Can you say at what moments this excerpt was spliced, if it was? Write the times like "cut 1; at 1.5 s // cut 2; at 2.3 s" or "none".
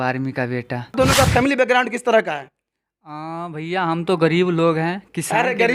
cut 1; at 0.9 s